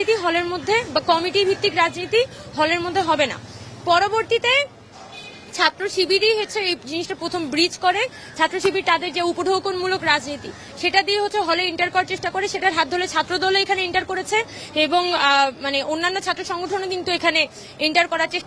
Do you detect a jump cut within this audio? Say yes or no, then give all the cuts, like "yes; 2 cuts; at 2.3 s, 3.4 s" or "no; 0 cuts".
no; 0 cuts